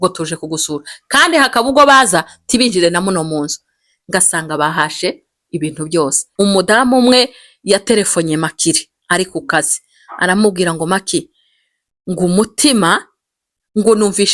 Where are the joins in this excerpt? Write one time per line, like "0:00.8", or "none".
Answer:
0:06.2

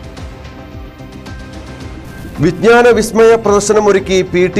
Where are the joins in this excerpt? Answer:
none

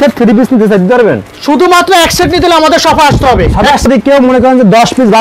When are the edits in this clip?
0:03.9

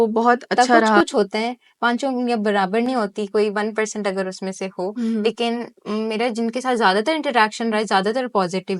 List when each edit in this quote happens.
0:01.0

